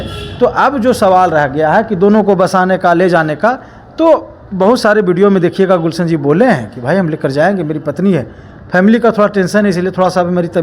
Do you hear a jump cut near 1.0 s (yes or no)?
no